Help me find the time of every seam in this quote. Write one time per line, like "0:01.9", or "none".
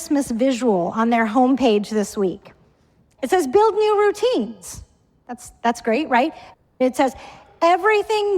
0:06.7